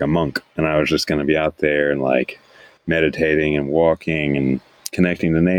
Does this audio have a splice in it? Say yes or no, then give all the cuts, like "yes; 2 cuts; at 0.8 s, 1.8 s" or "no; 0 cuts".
no; 0 cuts